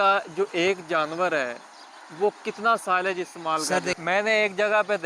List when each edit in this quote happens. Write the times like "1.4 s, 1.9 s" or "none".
4.0 s